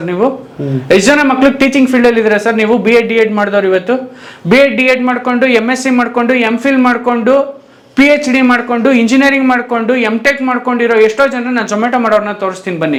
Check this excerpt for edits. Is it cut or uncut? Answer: uncut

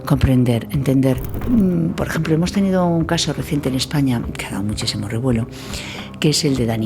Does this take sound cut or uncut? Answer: cut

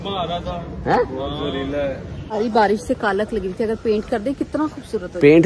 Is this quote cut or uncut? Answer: cut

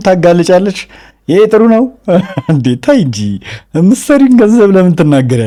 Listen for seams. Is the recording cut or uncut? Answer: uncut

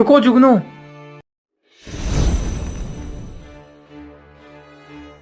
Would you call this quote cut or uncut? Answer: uncut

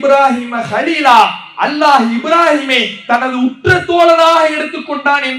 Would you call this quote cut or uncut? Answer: uncut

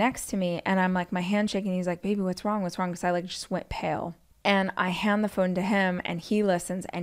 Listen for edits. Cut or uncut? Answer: cut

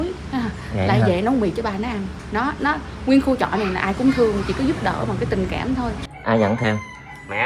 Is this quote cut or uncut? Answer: cut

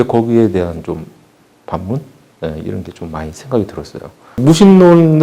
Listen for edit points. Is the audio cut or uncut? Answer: cut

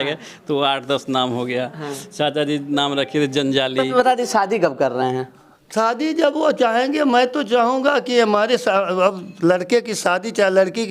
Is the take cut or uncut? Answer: cut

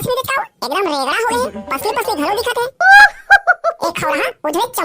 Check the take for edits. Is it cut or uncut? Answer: cut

